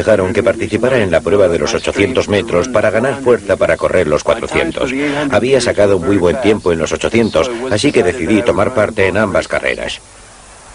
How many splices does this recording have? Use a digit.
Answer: 1